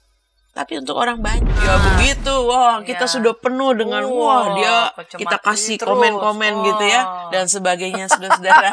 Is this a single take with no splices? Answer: no; 1 cut; at 1.6 s

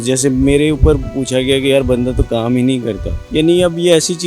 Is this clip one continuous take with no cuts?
no; 1 cut; at 3.1 s

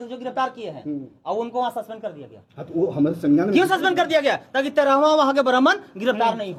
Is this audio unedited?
yes; 0 cuts

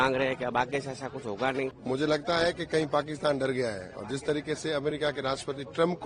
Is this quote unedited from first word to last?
no; 1 cut; at 1.8 s

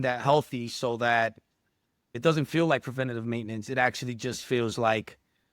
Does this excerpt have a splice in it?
yes; 1 cut; at 2.1 s

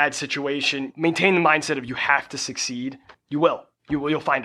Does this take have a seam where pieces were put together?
yes; 2 cuts; at 0.9 s, 3.1 s

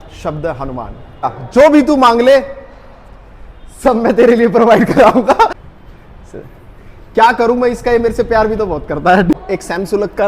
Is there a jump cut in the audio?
yes; 3 cuts; at 1.4 s, 5.6 s, 9.4 s

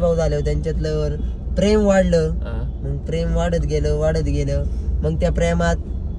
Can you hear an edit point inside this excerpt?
no; 0 cuts

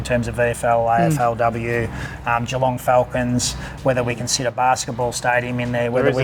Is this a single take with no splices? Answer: yes; 0 cuts

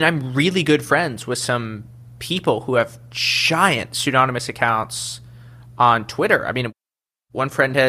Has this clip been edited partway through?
yes; 1 cut; at 6.8 s

